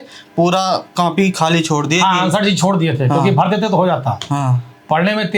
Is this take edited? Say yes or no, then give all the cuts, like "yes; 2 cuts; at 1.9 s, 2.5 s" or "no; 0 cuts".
no; 0 cuts